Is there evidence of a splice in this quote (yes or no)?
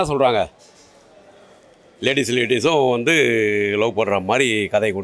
no